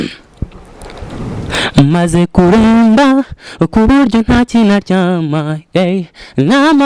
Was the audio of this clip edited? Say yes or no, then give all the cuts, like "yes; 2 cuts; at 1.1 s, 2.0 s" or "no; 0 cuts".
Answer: no; 0 cuts